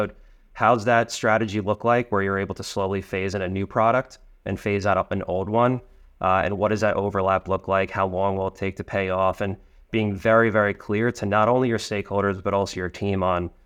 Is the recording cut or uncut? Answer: uncut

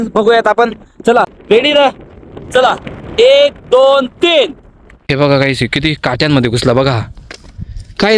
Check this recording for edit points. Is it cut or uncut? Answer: cut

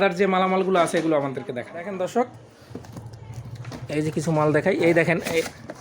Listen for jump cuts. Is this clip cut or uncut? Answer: cut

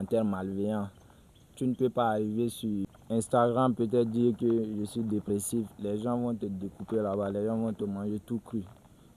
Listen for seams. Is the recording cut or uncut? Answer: cut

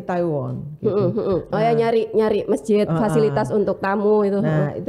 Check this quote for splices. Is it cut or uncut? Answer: uncut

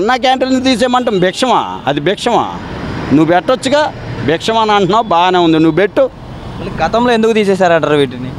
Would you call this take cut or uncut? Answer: uncut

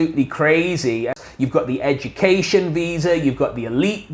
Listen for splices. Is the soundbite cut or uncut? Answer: cut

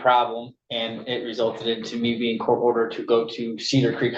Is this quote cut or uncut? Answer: uncut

